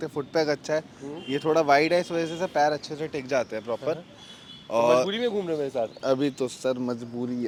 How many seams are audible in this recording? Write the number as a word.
zero